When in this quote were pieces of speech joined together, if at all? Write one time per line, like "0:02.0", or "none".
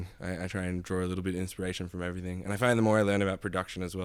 none